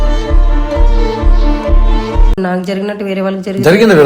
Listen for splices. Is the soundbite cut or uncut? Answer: cut